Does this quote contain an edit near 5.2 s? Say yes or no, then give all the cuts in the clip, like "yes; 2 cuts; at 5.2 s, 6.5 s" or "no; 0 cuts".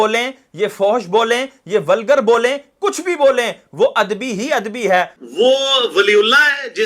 yes; 1 cut; at 5.2 s